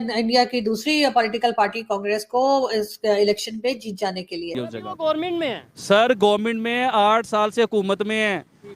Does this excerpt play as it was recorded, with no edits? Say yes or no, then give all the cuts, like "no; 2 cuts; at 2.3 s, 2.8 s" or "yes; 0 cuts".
no; 1 cut; at 4.7 s